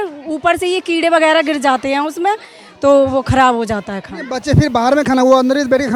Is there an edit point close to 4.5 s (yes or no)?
no